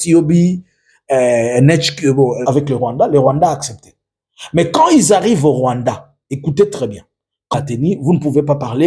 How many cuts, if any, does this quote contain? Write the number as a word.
two